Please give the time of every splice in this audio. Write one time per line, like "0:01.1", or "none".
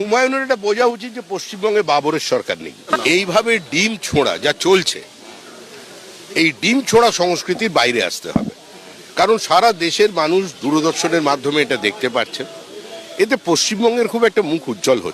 0:02.9

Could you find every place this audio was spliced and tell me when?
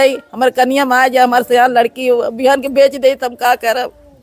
none

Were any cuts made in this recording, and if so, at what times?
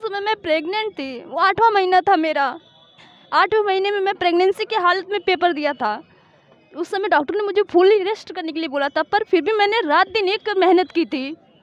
none

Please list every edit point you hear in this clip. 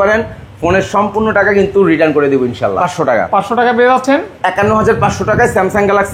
0:02.8

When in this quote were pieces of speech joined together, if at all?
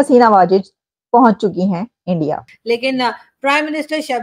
0:02.6

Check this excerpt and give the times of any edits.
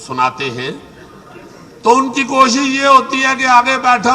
none

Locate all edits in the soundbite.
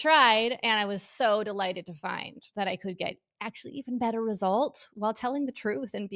none

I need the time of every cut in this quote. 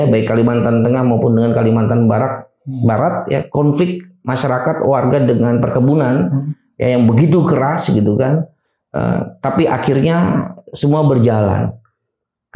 none

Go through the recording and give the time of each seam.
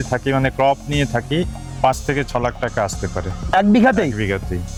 none

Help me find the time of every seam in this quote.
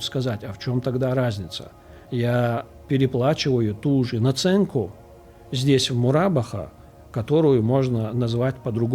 none

